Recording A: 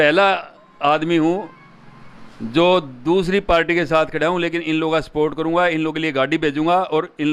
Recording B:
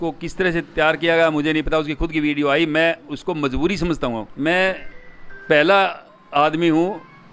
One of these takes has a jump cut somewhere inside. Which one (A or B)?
B